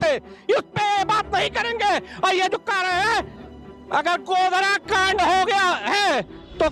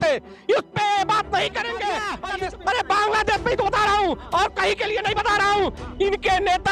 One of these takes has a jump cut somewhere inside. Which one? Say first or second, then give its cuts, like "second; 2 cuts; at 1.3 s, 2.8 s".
second; 1 cut; at 2.1 s